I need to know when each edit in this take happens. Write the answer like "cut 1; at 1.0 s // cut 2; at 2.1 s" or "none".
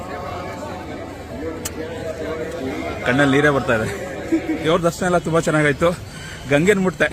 cut 1; at 4.6 s